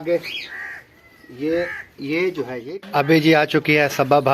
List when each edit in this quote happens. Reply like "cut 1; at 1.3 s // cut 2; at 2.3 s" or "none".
cut 1; at 2.7 s